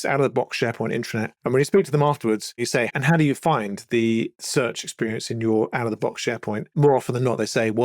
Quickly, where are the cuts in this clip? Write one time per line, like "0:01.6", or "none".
0:01.3
0:02.9
0:04.3
0:06.7